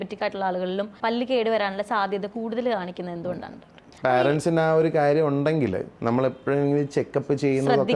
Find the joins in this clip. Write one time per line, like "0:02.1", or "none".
0:00.9
0:03.8
0:05.9